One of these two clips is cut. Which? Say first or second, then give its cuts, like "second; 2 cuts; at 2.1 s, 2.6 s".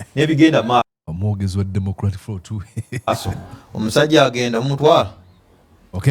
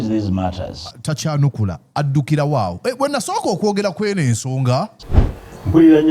second; 1 cut; at 5.0 s